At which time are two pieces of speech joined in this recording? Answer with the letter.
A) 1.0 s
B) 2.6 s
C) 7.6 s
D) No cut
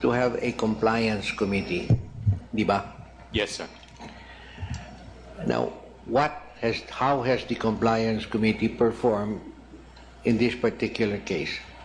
A